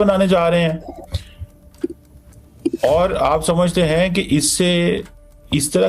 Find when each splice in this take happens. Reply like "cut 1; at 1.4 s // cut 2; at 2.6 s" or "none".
none